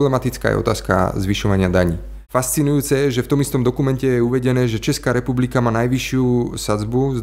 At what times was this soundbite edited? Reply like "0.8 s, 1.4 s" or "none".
2.2 s